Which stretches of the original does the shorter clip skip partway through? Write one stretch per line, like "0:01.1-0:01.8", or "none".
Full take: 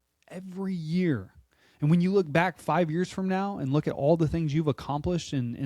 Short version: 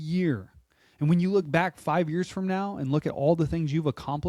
none